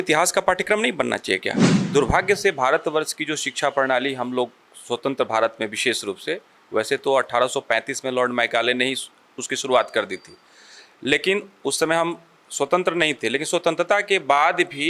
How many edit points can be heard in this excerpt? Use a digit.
1